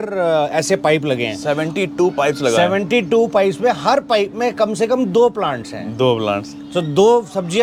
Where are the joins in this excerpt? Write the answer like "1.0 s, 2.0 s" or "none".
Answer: none